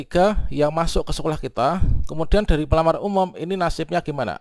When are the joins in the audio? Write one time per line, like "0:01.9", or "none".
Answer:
none